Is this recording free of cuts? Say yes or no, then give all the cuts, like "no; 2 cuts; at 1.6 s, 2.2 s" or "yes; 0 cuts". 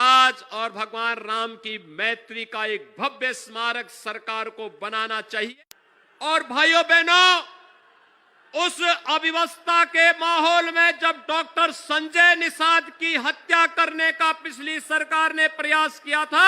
no; 1 cut; at 5.5 s